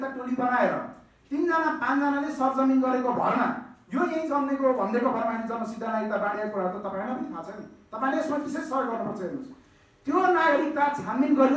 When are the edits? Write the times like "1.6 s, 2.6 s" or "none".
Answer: none